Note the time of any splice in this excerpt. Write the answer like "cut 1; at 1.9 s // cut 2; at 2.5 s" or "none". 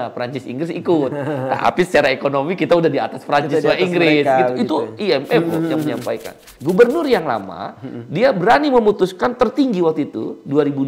cut 1; at 6.4 s